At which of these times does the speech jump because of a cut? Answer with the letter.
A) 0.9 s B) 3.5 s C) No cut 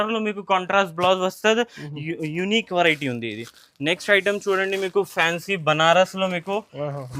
C